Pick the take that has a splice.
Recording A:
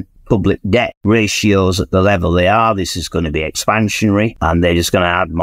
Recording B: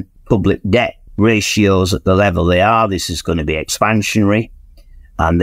A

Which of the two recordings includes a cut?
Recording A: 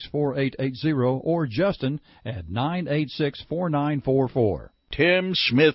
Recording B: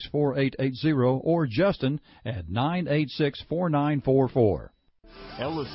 B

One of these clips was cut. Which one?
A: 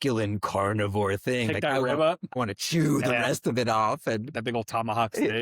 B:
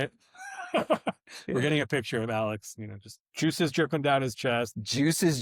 A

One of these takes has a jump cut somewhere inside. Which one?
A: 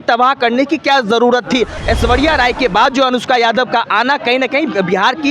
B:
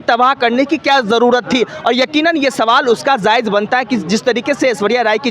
A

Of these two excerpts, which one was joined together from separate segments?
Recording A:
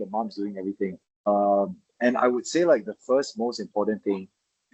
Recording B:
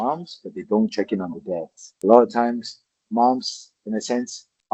A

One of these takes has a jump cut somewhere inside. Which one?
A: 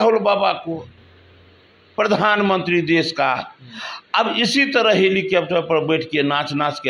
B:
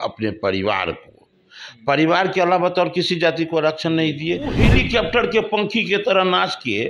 B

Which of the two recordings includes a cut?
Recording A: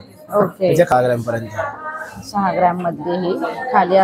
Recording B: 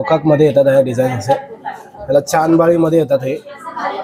A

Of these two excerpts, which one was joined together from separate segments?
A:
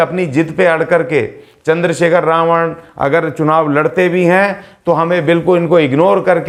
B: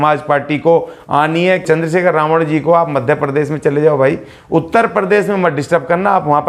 B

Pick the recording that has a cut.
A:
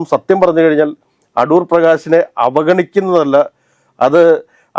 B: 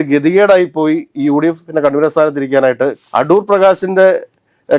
B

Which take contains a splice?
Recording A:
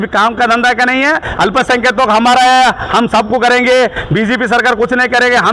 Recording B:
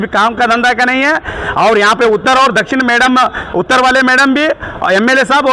A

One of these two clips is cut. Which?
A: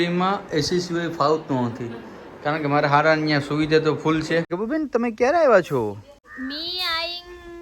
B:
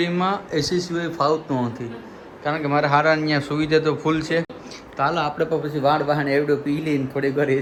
A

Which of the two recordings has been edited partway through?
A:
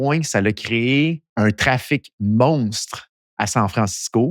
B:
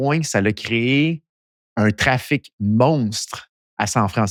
A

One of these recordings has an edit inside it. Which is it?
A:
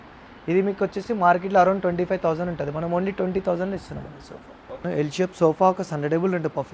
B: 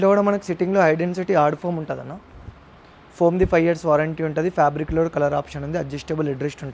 A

